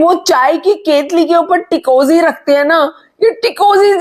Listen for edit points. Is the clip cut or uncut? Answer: uncut